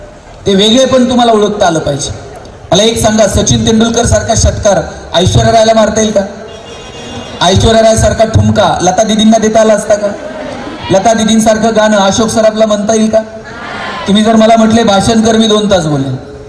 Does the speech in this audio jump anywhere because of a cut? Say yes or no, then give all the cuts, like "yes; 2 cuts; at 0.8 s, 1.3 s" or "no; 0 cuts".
no; 0 cuts